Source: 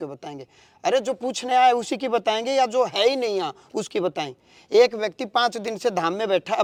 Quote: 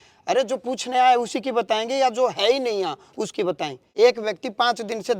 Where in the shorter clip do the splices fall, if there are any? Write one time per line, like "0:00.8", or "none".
0:03.8